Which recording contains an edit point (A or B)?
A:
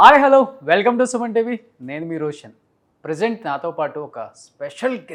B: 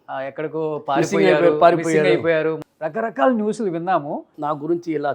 B